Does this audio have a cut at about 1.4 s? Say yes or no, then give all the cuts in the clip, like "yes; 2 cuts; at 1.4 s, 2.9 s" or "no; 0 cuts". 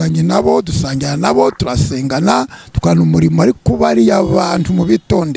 no; 0 cuts